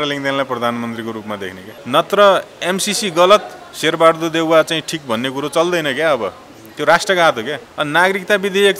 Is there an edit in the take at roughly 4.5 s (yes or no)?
no